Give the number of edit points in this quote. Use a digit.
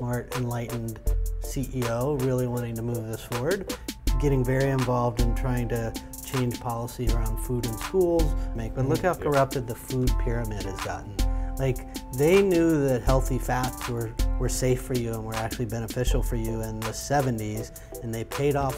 1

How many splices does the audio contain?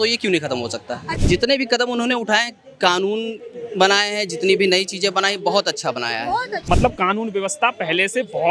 2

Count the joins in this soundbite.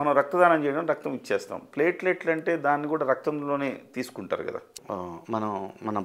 1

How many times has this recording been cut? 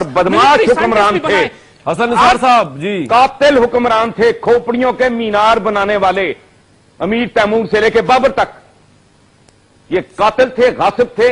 0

